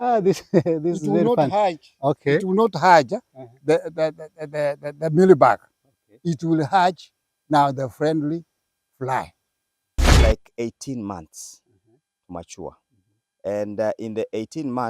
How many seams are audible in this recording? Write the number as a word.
one